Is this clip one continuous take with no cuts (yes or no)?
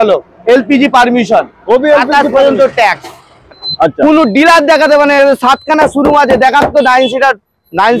no